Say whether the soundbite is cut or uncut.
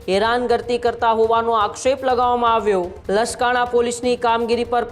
cut